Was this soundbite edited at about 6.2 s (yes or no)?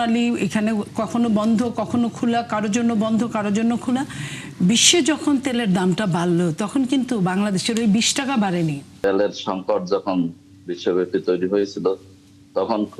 no